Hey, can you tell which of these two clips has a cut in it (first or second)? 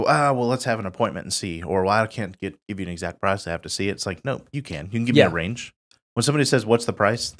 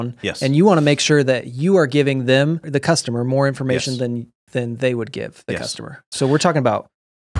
second